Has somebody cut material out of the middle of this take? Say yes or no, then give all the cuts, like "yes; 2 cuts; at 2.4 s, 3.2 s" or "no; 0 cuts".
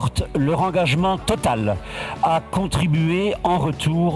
no; 0 cuts